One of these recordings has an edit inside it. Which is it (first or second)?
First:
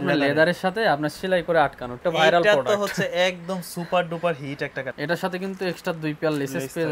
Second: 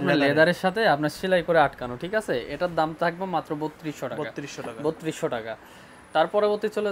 first